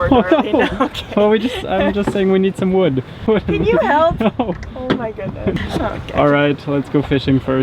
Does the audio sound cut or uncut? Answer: cut